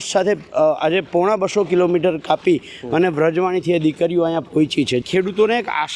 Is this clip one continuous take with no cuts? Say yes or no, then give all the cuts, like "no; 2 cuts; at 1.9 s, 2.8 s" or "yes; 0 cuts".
no; 1 cut; at 5.0 s